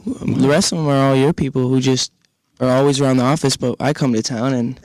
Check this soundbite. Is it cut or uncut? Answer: cut